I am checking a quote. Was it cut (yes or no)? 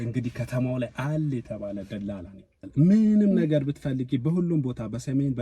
yes